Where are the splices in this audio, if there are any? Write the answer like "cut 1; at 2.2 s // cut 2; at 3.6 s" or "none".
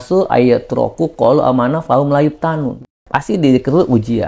cut 1; at 3.0 s